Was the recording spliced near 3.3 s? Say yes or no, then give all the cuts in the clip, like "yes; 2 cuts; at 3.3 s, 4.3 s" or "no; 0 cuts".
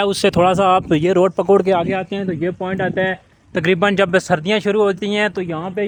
no; 0 cuts